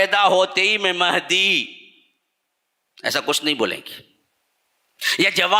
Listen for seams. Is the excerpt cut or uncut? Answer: uncut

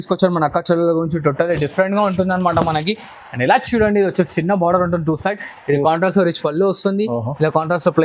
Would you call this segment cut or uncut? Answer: uncut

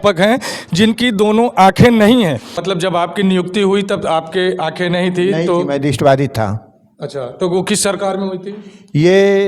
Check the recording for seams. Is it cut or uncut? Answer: cut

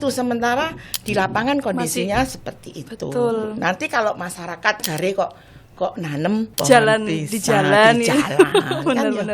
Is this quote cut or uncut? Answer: cut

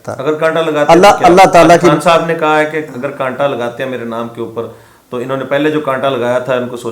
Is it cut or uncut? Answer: uncut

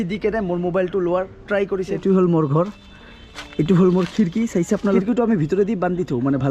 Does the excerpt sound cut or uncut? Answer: cut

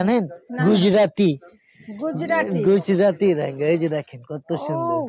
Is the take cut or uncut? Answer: uncut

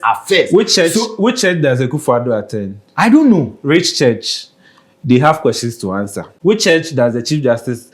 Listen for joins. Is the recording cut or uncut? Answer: cut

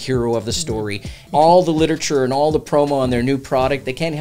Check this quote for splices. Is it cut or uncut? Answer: cut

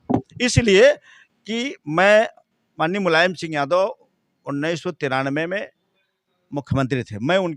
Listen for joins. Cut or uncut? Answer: uncut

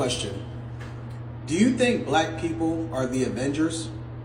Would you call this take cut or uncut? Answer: uncut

